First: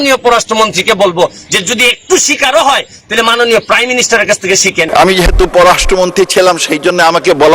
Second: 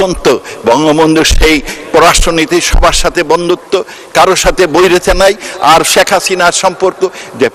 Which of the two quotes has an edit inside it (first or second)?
first